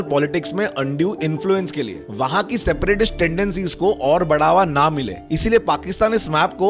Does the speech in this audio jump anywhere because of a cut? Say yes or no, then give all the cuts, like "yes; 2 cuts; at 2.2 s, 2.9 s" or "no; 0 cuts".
yes; 2 cuts; at 2.0 s, 5.2 s